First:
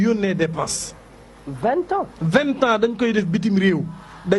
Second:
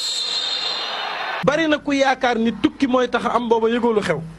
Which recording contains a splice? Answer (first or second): second